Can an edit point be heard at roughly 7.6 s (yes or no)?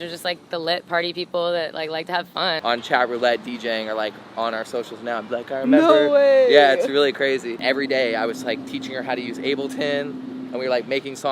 yes